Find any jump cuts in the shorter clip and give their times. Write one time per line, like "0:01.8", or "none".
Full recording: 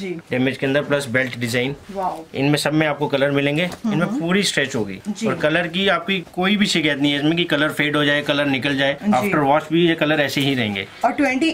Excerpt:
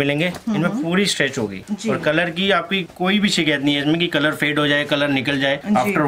none